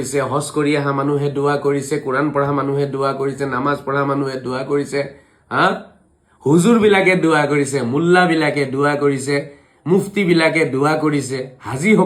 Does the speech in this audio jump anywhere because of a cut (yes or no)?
no